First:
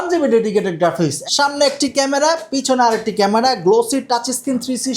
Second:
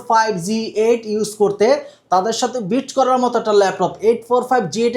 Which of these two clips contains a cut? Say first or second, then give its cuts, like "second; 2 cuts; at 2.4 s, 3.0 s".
first; 1 cut; at 1.2 s